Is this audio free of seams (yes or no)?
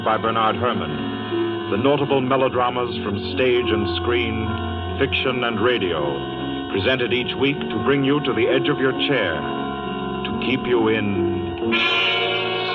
no